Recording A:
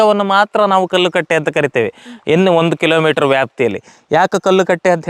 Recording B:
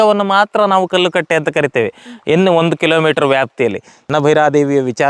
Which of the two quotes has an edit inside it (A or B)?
B